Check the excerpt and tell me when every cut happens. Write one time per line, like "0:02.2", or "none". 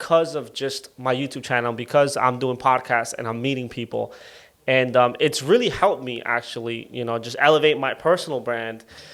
none